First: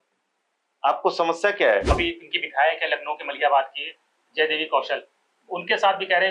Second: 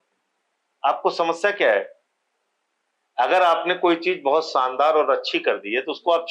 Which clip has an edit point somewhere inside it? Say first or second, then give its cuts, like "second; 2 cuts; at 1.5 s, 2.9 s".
first; 1 cut; at 1.9 s